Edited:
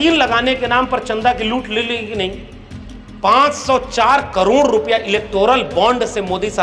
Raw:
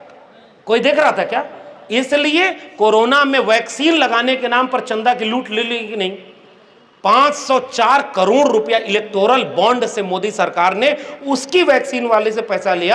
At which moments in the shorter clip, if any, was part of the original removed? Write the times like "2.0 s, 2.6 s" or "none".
none